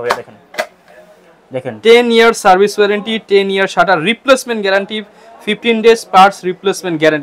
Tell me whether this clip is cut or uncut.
uncut